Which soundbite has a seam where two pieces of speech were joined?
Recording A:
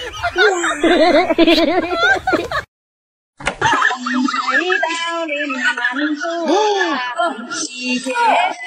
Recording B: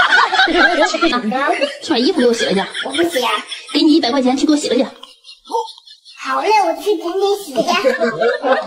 B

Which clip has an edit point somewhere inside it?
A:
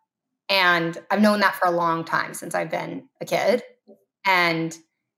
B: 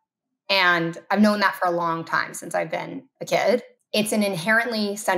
B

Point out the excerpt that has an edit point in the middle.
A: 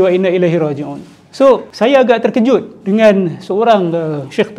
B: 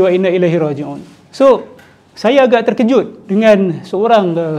A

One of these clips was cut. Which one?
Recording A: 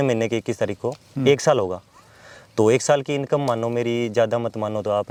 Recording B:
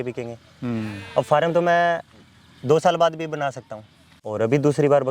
B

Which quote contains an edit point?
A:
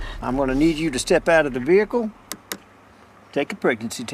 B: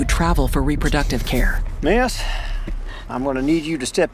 B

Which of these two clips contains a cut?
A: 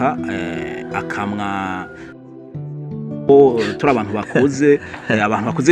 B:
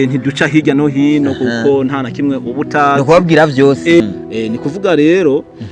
B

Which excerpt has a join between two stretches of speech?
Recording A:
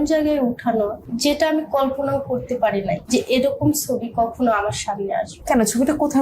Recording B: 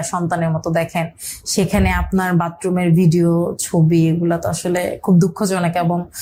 A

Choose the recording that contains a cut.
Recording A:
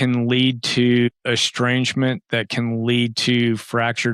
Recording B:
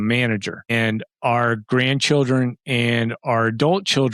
A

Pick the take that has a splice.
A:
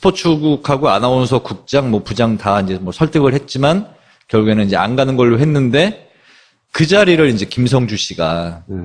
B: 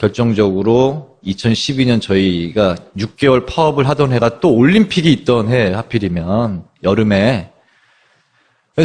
B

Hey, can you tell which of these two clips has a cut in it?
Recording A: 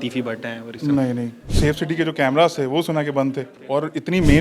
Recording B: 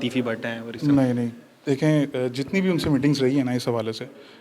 A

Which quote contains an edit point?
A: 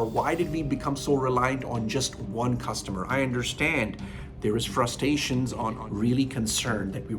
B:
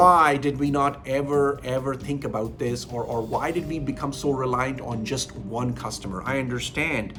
A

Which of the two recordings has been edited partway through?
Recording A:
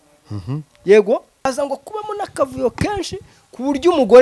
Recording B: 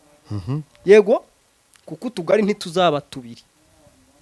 A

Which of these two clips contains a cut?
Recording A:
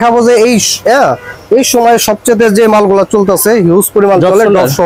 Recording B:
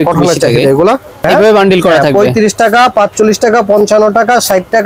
B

